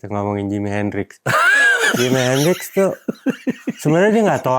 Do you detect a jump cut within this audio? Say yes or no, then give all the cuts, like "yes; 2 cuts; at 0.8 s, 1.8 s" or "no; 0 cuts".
no; 0 cuts